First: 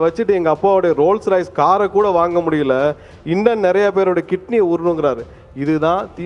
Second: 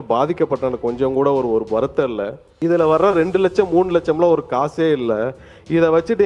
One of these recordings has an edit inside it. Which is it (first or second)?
second